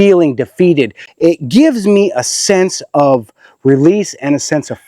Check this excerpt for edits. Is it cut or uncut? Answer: cut